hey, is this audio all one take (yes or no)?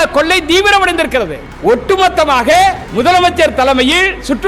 no